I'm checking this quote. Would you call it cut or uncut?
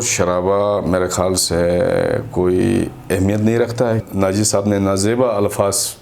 cut